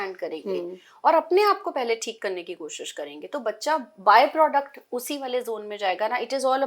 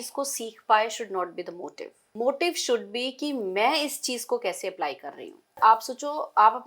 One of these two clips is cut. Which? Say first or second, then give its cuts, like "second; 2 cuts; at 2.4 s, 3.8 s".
second; 2 cuts; at 2.0 s, 5.6 s